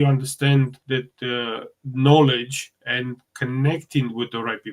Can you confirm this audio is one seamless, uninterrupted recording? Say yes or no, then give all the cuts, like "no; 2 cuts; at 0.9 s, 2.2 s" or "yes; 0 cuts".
yes; 0 cuts